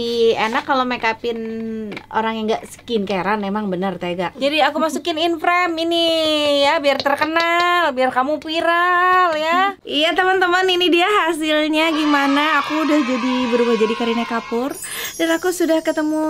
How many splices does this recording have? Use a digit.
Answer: 2